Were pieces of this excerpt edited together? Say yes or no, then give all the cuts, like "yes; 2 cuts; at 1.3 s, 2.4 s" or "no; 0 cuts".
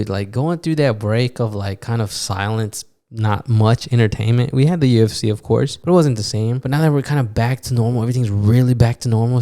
yes; 2 cuts; at 5.8 s, 6.6 s